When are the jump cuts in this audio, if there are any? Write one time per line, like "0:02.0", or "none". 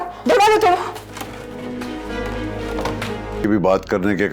0:03.4